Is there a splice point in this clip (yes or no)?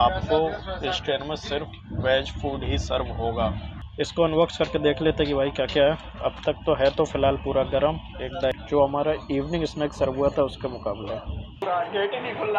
yes